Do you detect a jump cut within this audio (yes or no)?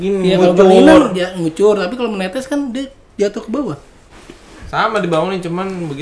yes